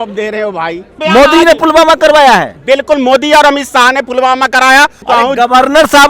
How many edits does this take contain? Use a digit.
2